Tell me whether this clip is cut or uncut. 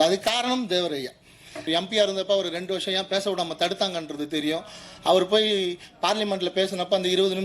cut